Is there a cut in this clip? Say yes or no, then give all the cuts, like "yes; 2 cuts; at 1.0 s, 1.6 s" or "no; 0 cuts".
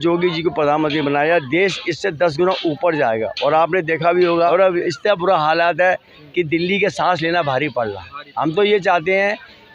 yes; 1 cut; at 4.5 s